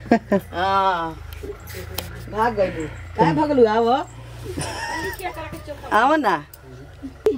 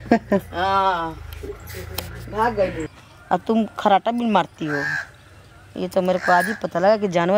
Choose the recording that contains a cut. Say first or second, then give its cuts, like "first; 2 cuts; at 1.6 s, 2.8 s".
second; 1 cut; at 3.0 s